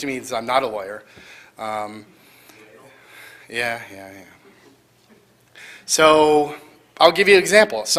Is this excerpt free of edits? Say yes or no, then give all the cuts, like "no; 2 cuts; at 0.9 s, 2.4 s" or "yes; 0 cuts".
yes; 0 cuts